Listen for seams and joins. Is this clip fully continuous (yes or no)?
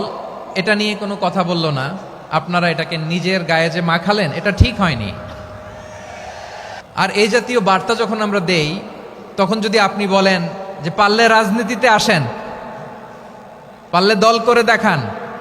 no